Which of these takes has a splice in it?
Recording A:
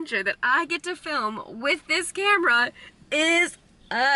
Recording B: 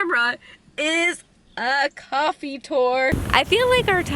B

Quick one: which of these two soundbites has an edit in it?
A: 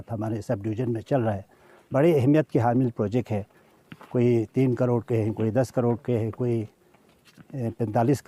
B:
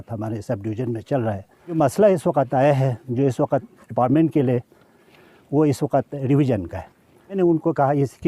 B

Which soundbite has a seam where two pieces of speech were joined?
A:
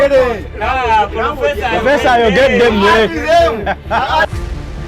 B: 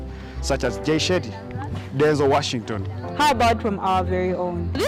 A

